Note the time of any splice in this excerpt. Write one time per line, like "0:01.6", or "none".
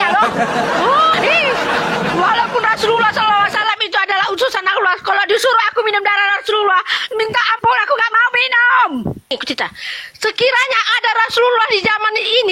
0:01.1
0:09.3